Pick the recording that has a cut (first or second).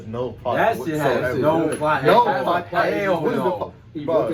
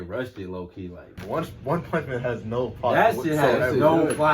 second